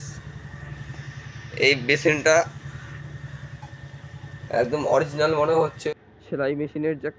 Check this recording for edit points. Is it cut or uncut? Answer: cut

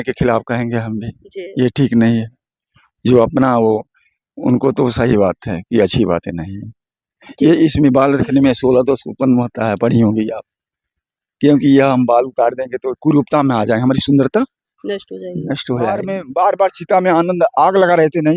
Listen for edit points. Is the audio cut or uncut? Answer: cut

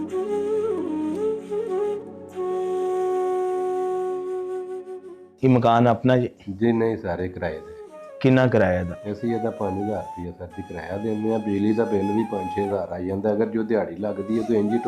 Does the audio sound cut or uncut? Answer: uncut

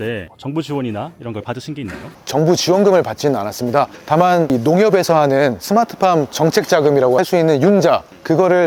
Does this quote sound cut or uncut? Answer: uncut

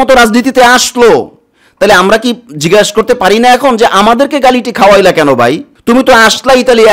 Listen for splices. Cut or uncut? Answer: uncut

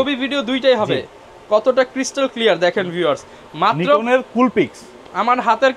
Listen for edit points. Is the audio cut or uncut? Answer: uncut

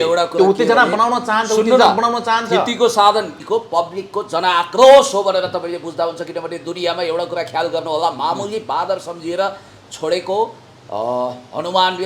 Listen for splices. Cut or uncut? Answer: cut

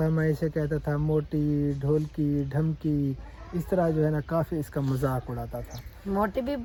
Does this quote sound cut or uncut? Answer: uncut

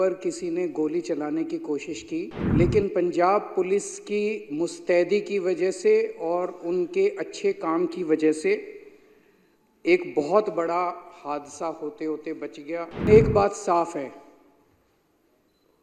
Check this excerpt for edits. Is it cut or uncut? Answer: cut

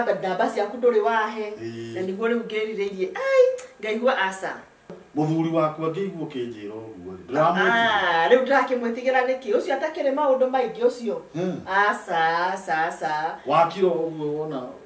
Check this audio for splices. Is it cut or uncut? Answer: cut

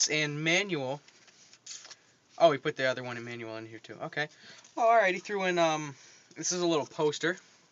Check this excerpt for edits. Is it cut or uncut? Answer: cut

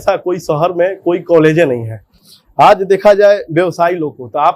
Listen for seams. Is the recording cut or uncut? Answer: uncut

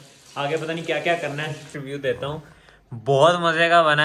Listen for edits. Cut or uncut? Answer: cut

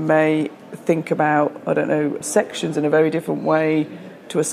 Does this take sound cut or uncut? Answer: cut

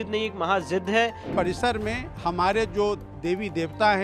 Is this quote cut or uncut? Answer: cut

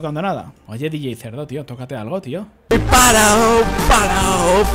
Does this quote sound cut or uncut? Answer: uncut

